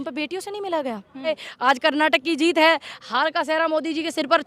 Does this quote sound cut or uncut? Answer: cut